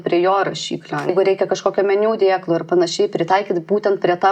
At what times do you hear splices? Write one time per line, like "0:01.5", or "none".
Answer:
0:01.1